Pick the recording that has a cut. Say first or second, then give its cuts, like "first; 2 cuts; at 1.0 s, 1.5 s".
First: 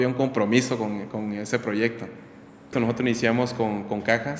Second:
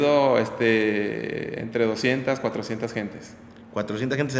first; 1 cut; at 2.7 s